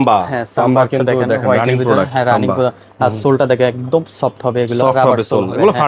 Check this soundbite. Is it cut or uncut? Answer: uncut